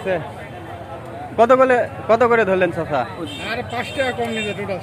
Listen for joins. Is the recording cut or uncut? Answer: uncut